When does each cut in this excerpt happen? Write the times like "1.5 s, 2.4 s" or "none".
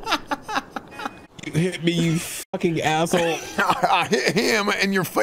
1.1 s